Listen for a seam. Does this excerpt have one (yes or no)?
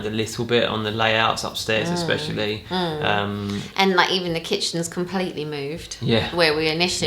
no